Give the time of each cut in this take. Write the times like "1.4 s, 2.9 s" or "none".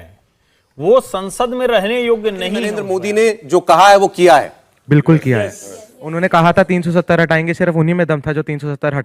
2.9 s